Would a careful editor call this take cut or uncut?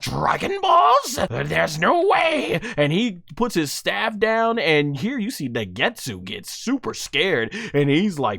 cut